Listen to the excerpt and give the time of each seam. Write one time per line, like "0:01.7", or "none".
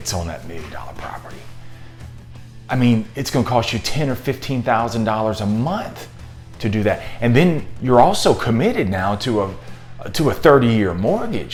none